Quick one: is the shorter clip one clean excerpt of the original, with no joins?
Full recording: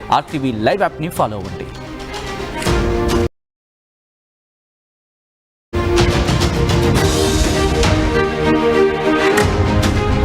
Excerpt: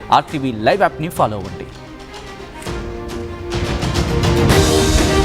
no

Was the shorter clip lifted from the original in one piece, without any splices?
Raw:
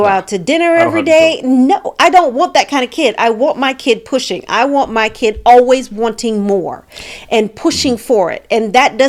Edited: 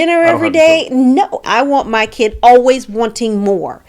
no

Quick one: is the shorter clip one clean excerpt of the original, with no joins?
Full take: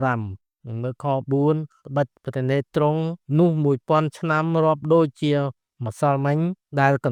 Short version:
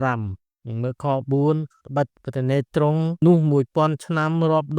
no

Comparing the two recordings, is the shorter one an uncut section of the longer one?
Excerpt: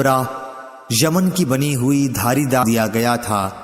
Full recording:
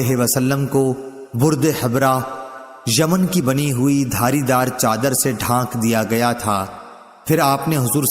no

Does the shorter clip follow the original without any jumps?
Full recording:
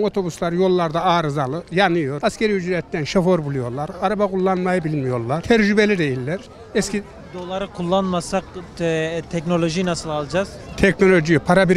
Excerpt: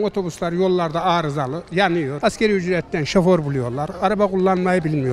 yes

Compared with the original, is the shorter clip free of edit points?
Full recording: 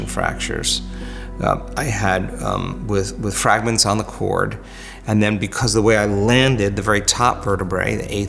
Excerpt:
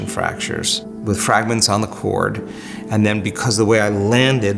no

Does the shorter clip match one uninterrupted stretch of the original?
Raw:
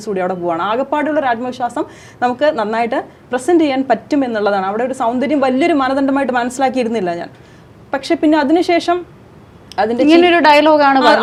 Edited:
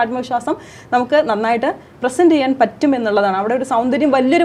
yes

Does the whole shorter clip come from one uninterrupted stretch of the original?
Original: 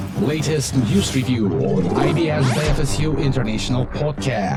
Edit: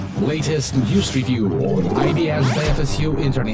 yes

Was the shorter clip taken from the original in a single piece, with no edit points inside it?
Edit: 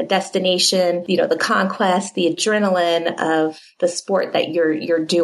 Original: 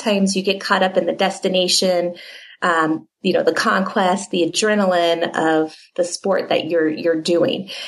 no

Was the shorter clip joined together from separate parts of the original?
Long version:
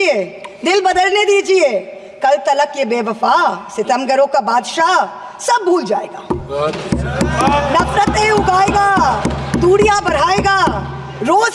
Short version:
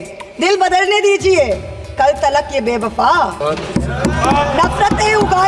yes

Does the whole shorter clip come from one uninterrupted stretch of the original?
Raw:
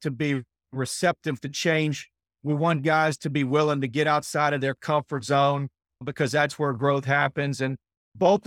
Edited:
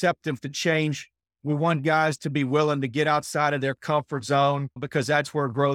no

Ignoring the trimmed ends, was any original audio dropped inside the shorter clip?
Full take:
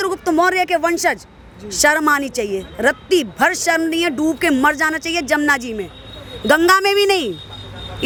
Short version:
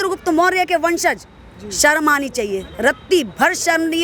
no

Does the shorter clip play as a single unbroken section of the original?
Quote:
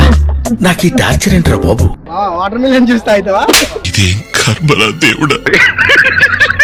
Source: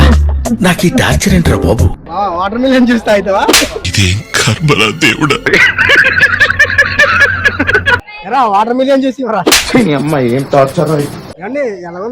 yes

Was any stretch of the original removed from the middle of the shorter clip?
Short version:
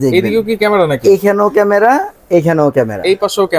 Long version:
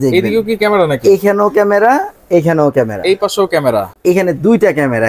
no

